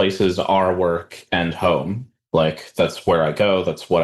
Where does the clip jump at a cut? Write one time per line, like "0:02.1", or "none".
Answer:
0:02.1

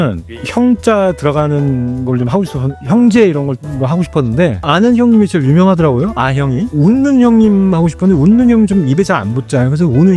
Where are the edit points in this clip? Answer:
0:03.6
0:04.6
0:06.7

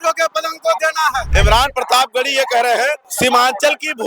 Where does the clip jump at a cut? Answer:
0:01.2
0:03.1

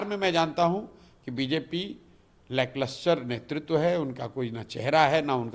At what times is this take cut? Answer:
none

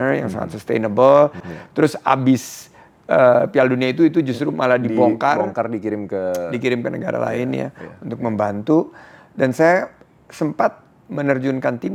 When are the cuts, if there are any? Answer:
none

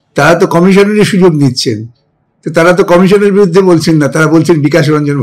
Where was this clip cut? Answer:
none

